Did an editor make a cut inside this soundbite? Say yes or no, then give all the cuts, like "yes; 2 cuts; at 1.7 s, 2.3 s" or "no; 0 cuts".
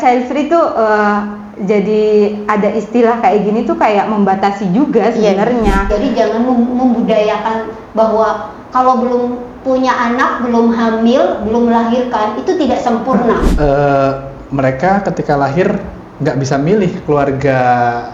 yes; 2 cuts; at 5.9 s, 13.5 s